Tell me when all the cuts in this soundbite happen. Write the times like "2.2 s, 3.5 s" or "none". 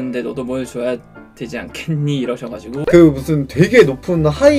2.7 s